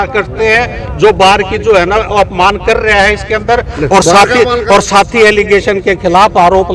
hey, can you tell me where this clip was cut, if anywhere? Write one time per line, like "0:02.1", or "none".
none